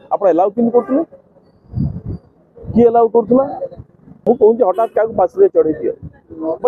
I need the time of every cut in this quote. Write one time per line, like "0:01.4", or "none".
0:04.2